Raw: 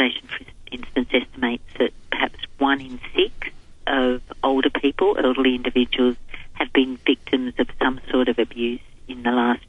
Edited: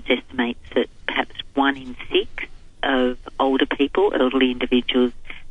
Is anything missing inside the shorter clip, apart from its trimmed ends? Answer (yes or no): no